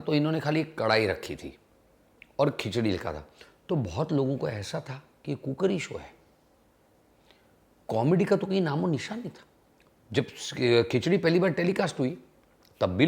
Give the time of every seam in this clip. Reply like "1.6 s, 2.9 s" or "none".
none